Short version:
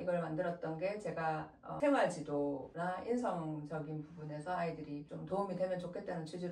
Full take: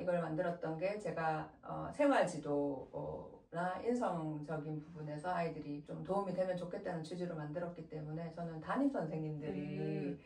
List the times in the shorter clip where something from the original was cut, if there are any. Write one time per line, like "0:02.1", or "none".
0:01.7
0:02.7